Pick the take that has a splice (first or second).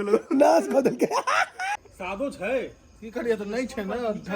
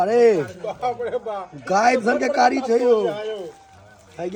first